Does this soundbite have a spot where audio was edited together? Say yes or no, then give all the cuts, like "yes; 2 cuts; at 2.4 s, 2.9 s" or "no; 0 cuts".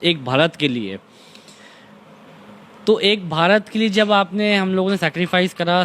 no; 0 cuts